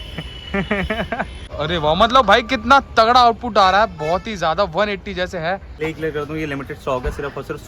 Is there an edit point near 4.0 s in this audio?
no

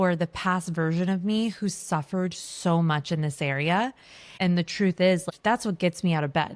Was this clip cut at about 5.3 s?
yes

